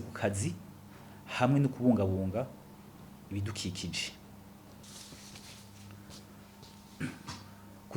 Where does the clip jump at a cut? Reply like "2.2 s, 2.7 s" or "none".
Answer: 4.8 s

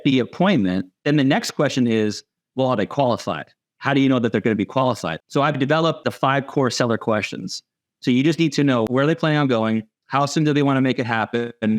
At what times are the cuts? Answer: 0.9 s, 5.1 s, 6.1 s, 8.9 s

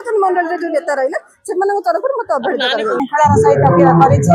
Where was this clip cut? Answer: 3.1 s

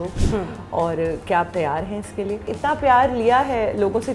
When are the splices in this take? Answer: 2.5 s

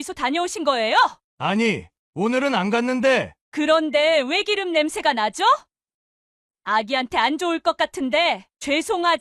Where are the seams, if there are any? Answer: 1.2 s

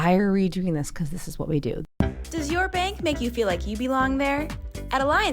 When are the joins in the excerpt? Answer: 1.8 s

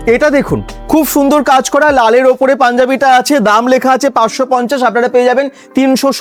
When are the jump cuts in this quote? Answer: none

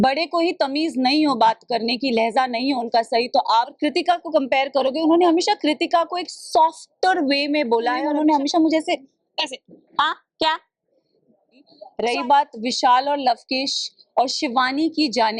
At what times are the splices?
3.8 s, 8.1 s, 11.8 s

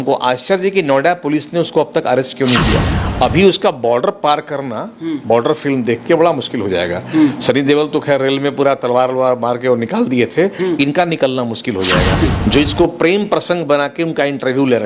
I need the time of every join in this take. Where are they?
2.9 s, 12.3 s

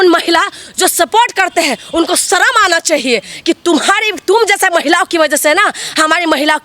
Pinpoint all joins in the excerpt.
none

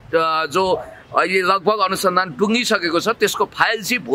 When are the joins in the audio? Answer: none

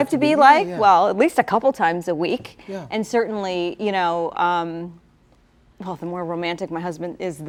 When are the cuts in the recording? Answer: none

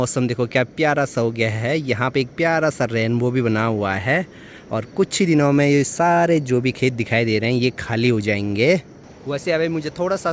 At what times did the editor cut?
none

